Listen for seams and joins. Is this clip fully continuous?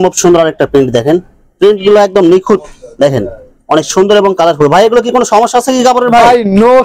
yes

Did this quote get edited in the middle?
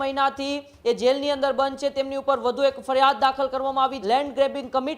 yes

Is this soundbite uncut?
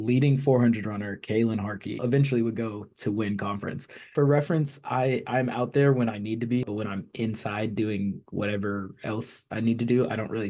no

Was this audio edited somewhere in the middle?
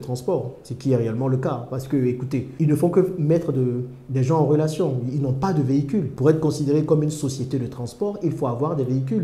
no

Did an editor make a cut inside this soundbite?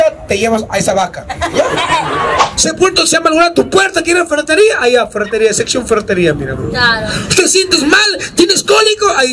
yes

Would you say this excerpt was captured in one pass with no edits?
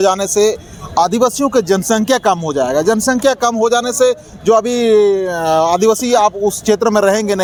yes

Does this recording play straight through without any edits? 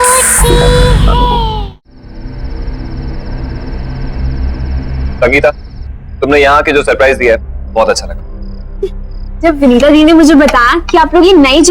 no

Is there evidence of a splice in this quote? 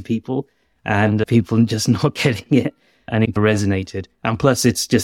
yes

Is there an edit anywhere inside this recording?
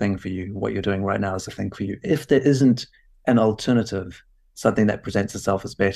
no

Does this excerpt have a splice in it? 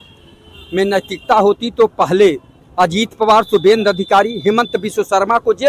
no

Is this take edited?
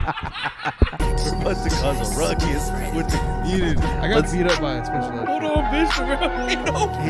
yes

